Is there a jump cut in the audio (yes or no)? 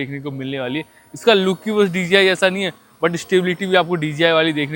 no